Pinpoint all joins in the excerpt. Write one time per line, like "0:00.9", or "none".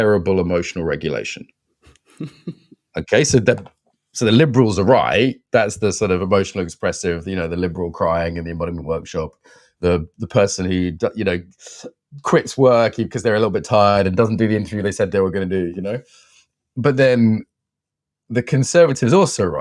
none